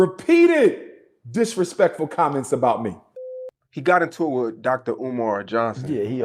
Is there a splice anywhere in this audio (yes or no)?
yes